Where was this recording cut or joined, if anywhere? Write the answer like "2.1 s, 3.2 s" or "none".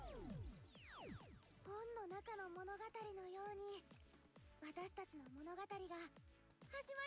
1.4 s